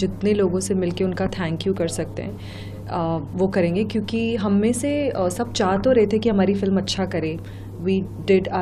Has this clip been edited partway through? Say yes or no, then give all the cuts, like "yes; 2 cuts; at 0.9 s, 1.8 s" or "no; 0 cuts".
no; 0 cuts